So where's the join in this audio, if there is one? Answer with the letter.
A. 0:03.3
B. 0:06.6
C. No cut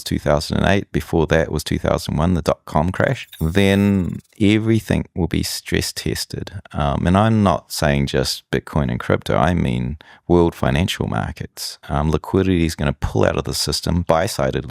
A